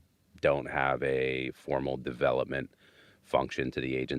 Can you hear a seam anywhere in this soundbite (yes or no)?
no